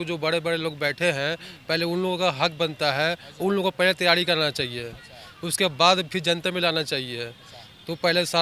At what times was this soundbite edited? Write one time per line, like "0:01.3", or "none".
none